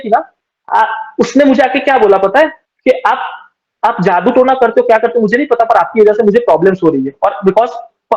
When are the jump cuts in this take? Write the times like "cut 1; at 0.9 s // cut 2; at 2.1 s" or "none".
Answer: cut 1; at 2.7 s

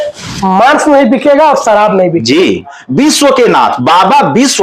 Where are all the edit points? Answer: cut 1; at 2.8 s

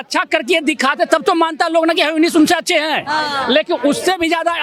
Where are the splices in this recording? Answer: none

